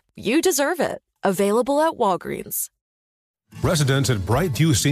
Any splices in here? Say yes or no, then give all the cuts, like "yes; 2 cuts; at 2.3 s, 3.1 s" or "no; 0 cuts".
yes; 1 cut; at 3.2 s